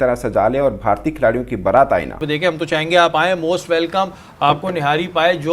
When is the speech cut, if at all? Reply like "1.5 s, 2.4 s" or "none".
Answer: 2.2 s